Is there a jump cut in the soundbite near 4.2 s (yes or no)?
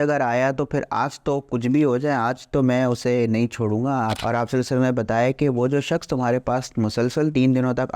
yes